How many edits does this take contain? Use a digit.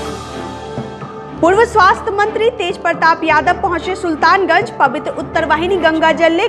1